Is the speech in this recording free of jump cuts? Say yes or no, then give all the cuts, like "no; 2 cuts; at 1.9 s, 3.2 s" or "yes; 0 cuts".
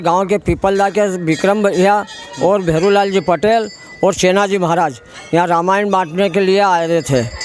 yes; 0 cuts